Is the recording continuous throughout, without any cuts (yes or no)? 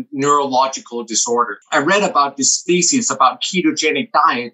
no